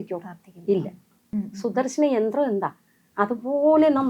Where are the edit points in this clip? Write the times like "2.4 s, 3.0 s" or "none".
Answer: 1.2 s